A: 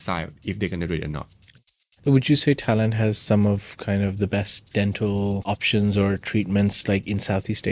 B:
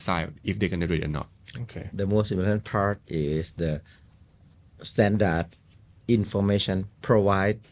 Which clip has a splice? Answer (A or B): A